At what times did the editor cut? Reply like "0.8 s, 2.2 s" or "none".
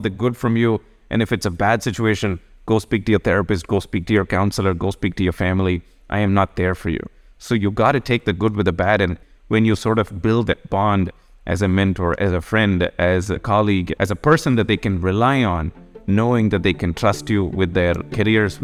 9.2 s